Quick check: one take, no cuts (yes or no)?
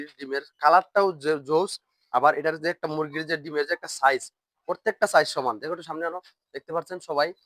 yes